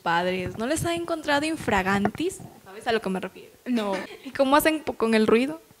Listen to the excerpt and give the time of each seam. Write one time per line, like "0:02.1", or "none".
0:04.1